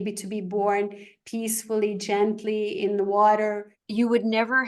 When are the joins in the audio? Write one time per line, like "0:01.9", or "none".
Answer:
0:03.7